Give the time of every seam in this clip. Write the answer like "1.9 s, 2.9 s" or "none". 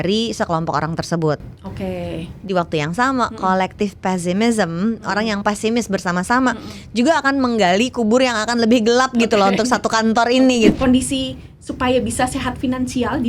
10.7 s

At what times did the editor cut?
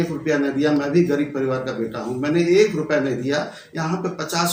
none

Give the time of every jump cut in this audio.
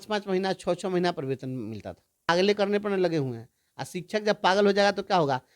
2.3 s

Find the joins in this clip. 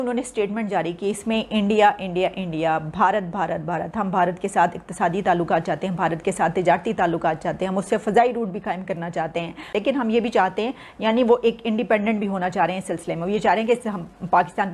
9.6 s

